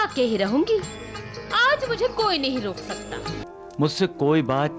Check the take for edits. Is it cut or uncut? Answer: cut